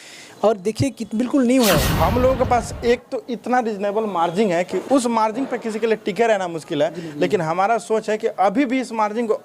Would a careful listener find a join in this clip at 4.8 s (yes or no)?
yes